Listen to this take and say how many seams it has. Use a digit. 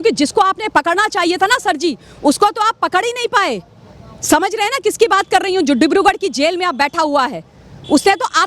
0